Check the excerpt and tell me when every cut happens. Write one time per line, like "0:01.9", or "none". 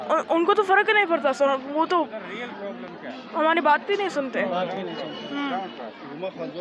none